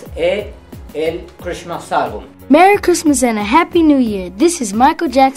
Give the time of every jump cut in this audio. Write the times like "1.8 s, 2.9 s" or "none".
2.3 s